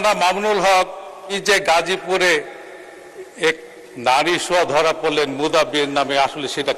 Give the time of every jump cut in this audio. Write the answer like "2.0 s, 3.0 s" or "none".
1.4 s